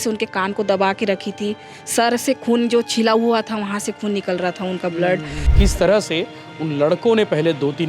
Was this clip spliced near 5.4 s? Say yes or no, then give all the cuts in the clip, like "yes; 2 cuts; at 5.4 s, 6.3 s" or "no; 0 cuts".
yes; 1 cut; at 5.4 s